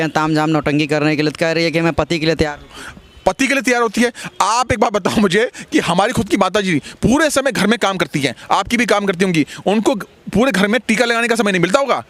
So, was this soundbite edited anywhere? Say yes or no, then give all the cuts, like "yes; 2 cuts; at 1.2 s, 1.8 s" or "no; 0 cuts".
no; 0 cuts